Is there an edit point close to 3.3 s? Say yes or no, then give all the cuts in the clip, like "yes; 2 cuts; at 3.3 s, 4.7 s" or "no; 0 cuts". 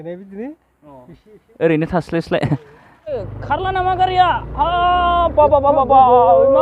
yes; 1 cut; at 3.3 s